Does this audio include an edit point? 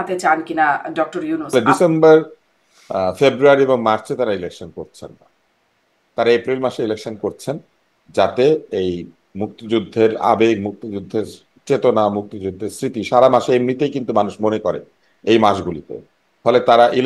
yes; 1 cut; at 1.5 s

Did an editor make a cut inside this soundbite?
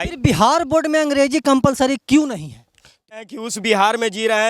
yes; 1 cut; at 3.2 s

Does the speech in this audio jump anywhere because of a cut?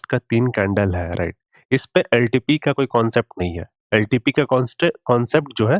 no; 0 cuts

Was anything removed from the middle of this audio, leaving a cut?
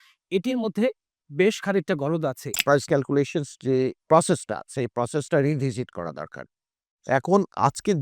yes; 2 cuts; at 2.9 s, 4.0 s

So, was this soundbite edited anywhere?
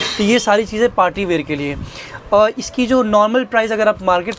no; 0 cuts

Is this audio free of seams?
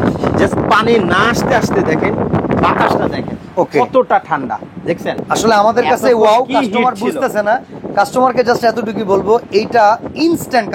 yes; 0 cuts

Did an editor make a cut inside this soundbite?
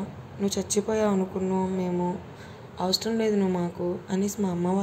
no; 0 cuts

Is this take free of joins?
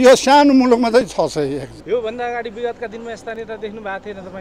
no; 1 cut; at 1.7 s

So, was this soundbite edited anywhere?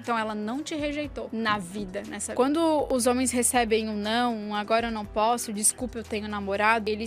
no; 0 cuts

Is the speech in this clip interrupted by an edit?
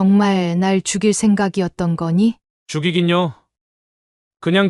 yes; 1 cut; at 2.5 s

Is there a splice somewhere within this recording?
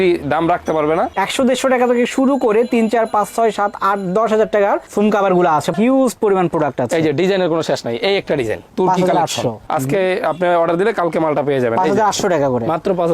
yes; 3 cuts; at 1.1 s, 5.7 s, 9.6 s

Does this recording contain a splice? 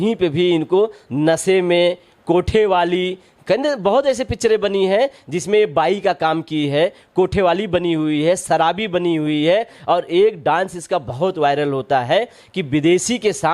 no; 0 cuts

